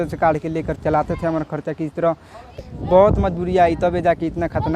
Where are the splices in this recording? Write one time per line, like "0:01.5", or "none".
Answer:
0:02.6